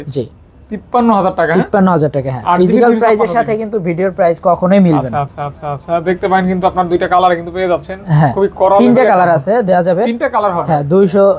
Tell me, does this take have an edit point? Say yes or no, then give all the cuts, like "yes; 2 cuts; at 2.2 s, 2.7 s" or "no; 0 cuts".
no; 0 cuts